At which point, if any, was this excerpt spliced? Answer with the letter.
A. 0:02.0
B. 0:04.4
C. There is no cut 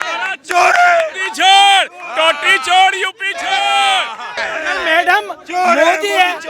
B